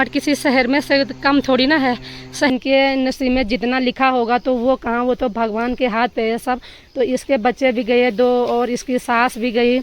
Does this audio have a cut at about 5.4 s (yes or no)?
no